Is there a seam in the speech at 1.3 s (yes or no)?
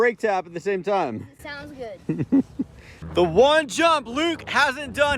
no